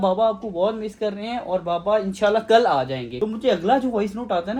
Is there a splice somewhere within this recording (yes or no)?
no